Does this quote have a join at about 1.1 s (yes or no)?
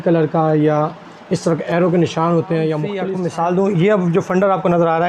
no